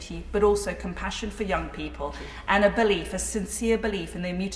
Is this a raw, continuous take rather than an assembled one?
yes; 0 cuts

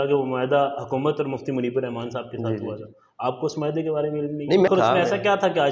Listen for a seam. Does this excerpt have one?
yes; 1 cut; at 4.7 s

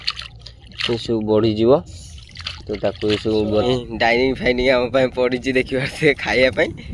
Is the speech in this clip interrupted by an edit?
yes; 1 cut; at 3.7 s

